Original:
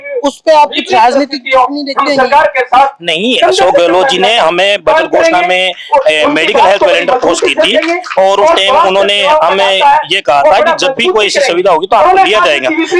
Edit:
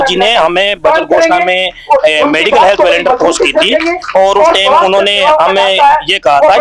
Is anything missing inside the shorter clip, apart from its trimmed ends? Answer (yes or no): no